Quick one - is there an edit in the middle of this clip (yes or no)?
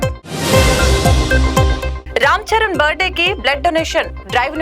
yes